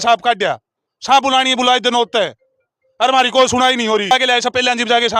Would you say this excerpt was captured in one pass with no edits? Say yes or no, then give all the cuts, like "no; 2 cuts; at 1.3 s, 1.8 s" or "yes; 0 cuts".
no; 1 cut; at 4.1 s